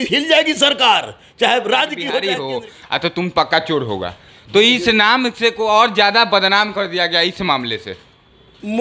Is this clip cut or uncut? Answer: cut